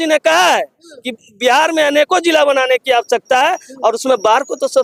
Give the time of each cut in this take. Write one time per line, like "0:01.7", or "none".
none